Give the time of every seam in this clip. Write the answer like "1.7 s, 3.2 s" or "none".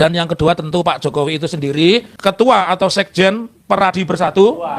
2.1 s